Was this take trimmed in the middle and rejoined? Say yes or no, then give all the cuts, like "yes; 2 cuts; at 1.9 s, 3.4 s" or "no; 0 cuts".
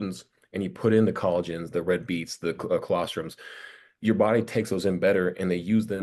no; 0 cuts